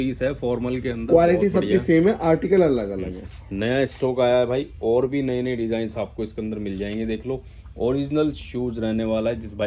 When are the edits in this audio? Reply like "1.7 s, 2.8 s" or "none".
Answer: none